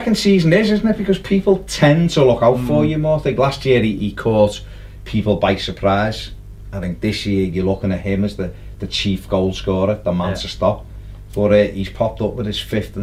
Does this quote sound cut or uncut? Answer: uncut